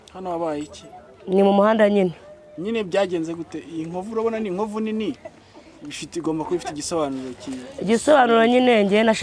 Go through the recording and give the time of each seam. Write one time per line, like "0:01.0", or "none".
none